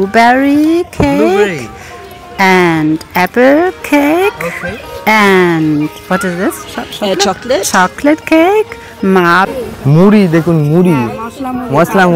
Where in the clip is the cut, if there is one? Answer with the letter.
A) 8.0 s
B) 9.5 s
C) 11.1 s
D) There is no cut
B